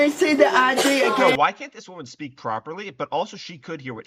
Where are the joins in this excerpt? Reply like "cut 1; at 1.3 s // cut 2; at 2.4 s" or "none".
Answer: cut 1; at 1.2 s

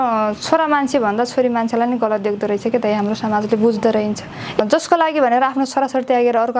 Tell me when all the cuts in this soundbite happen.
cut 1; at 4.6 s

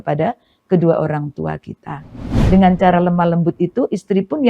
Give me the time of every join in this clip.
cut 1; at 2.3 s

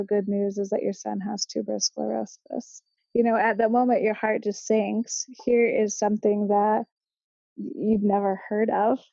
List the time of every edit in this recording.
cut 1; at 2.9 s

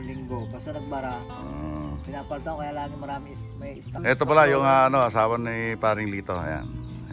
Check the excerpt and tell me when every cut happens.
cut 1; at 3.9 s

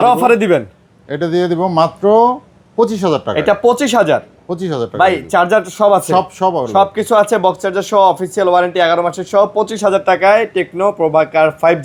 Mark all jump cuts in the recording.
none

